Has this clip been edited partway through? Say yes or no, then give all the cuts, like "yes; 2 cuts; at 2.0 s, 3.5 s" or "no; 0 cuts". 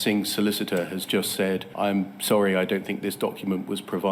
yes; 1 cut; at 1.7 s